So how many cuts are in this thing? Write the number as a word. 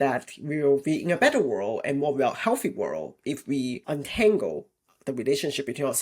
one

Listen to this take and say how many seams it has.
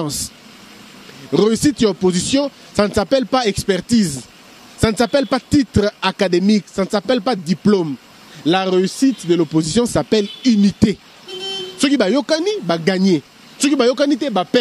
zero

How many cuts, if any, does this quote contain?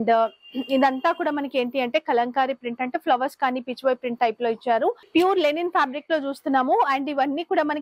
one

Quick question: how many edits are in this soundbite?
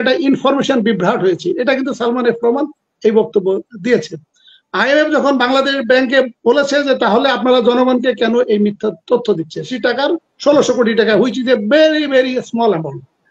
one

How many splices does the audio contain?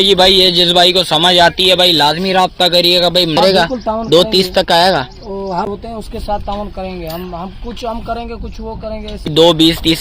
three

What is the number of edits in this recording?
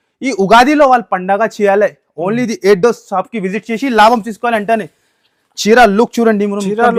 zero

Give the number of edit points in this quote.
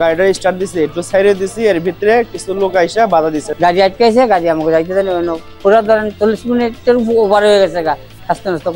one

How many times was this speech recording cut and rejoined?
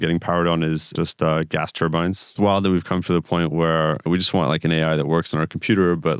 three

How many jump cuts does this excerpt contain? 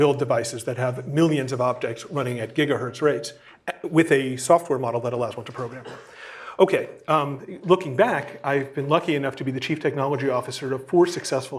zero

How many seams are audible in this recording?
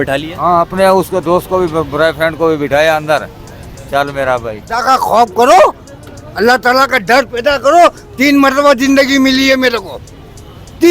one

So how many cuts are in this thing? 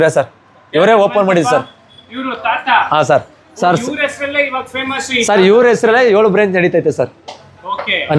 zero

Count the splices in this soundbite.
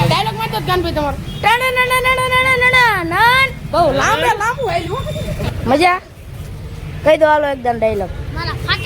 one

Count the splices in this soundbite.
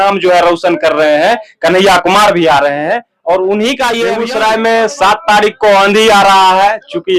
one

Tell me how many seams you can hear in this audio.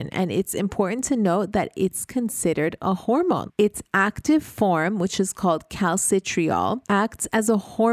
two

